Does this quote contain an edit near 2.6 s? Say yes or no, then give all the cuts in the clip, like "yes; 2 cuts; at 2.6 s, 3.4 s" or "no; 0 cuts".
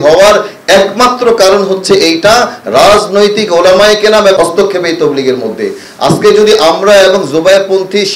no; 1 cut; at 4.4 s